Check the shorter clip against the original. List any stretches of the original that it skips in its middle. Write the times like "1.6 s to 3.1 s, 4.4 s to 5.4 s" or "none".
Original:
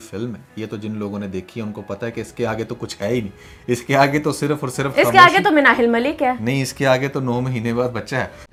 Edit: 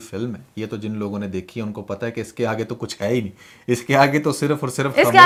none